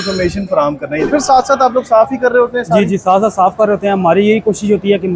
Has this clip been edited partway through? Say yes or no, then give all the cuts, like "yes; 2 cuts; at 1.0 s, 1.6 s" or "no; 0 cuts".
yes; 1 cut; at 1.1 s